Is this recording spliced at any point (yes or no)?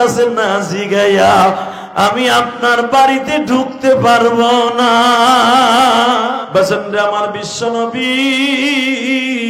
yes